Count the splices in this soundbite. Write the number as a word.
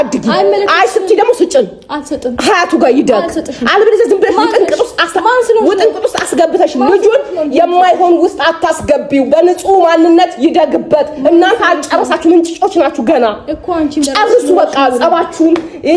zero